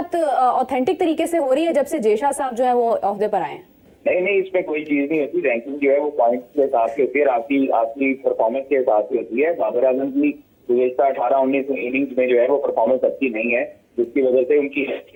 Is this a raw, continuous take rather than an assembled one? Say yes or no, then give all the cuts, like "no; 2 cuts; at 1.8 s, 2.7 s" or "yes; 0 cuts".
yes; 0 cuts